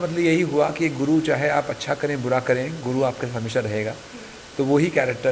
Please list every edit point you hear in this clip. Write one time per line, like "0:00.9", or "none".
none